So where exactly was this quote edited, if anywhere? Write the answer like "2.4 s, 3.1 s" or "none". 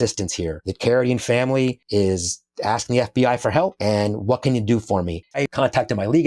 1.8 s, 5.4 s

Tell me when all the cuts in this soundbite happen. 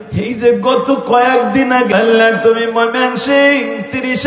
1.9 s

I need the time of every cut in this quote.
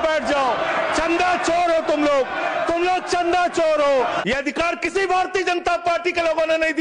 4.2 s

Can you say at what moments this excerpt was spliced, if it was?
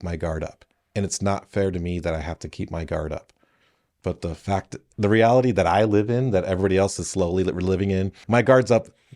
8.2 s

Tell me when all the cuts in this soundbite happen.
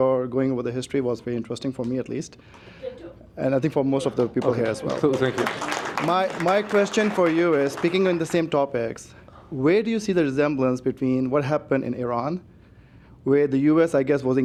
none

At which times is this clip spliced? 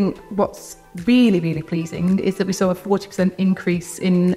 none

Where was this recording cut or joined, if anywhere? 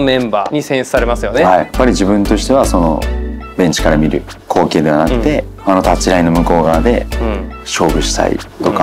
1.7 s

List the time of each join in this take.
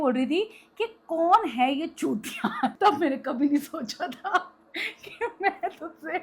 2.7 s

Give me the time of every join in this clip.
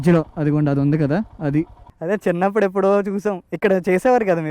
1.9 s

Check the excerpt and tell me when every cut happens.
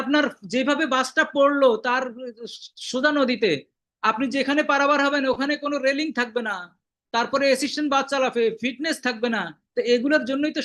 none

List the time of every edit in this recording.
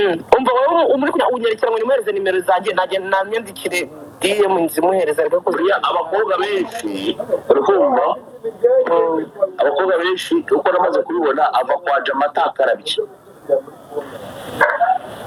none

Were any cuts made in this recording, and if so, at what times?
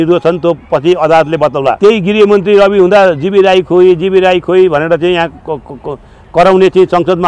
1.8 s

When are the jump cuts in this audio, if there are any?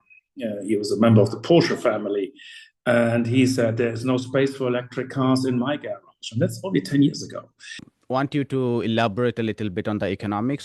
7.9 s

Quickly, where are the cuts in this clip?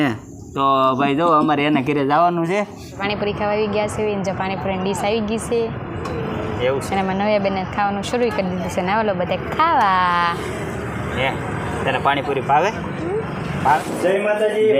3.0 s, 13.8 s

